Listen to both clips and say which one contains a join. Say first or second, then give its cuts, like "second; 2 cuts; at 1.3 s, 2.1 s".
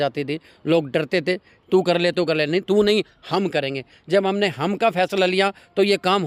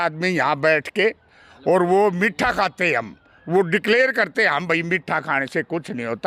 first; 1 cut; at 1.5 s